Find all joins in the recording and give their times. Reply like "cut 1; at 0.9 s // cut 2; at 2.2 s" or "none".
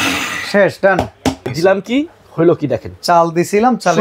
cut 1; at 1.5 s